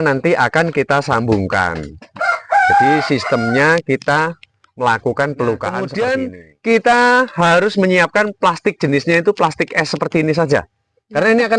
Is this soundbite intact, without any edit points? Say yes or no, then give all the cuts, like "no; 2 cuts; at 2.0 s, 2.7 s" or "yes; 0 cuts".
no; 1 cut; at 5.9 s